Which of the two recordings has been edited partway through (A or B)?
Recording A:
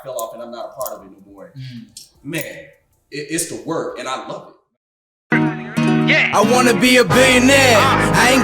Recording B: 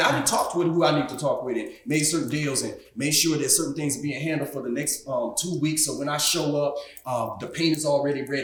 A